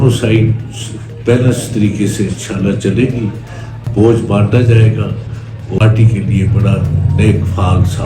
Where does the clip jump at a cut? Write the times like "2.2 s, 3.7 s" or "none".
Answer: 5.8 s